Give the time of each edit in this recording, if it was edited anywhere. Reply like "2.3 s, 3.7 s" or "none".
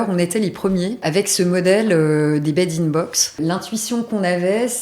1.0 s, 3.4 s